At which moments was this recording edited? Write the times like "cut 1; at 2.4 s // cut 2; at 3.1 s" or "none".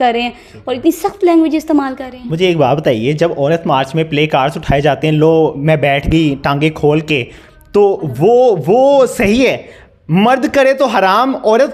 none

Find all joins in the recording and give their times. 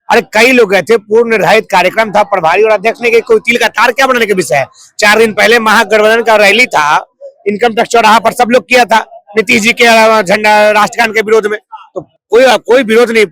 none

